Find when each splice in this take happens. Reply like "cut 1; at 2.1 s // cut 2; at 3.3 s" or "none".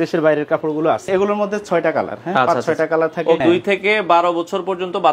cut 1; at 1.1 s // cut 2; at 3.4 s